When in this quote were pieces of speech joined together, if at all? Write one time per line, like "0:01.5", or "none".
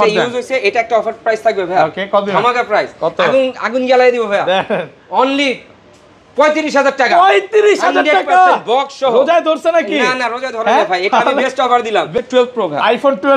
0:12.1

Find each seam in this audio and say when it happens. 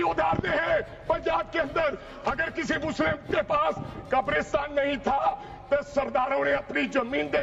none

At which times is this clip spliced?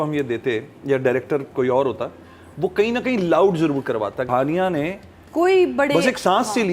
0:04.3

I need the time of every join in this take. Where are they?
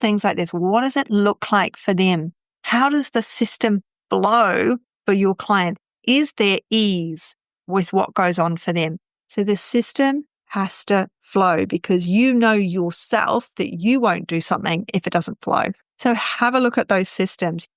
0:09.2
0:15.8

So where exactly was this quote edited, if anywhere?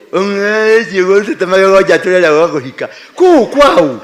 none

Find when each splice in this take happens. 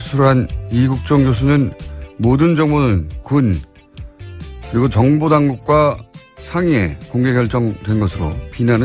none

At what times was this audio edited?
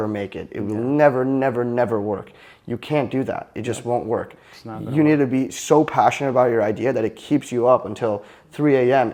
none

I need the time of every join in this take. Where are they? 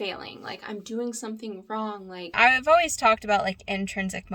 0:02.3

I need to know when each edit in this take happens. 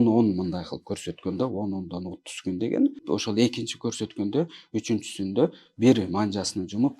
0:03.0

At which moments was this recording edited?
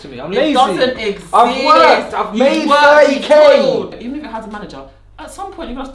0:03.9

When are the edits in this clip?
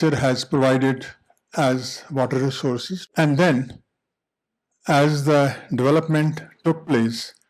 0:02.9

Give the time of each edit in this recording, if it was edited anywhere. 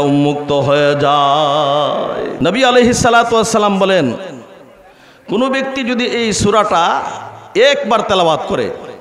0:02.3

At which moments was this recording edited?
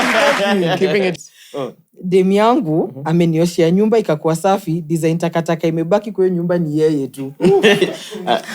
0:01.2

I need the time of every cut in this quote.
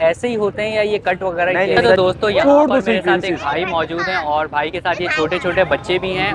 0:01.9

